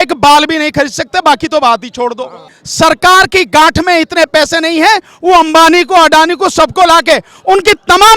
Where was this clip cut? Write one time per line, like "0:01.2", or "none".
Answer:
0:02.6